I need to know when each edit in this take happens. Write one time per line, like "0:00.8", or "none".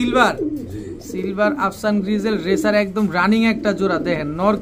none